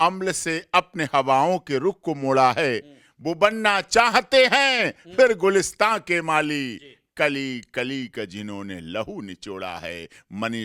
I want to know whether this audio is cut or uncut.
uncut